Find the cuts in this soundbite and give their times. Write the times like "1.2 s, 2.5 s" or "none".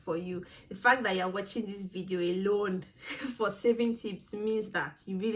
none